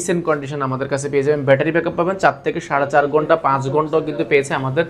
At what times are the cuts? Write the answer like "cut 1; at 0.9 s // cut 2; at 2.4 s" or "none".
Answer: none